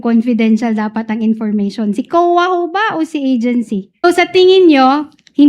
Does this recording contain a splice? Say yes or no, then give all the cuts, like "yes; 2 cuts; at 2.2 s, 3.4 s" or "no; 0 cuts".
yes; 1 cut; at 4.0 s